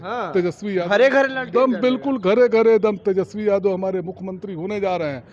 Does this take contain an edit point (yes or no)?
no